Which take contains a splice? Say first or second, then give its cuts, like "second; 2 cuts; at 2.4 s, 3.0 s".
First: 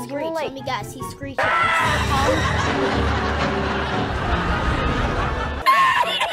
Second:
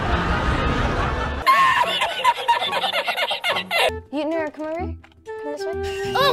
second; 1 cut; at 3.9 s